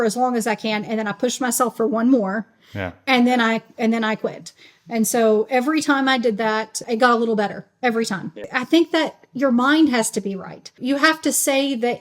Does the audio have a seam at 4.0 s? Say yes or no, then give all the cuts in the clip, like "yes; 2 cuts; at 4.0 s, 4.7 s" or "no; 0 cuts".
no; 3 cuts; at 6.8 s, 8.5 s, 10.8 s